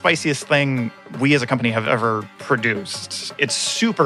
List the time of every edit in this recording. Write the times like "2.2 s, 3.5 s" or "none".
3.1 s